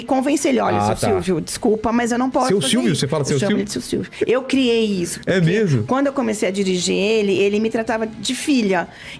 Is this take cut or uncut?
uncut